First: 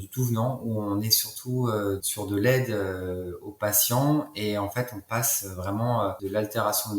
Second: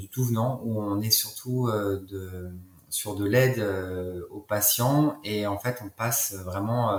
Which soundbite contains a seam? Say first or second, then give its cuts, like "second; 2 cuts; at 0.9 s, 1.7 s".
first; 2 cuts; at 2.1 s, 6.2 s